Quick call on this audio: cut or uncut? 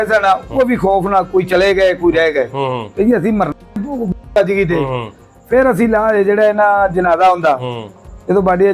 uncut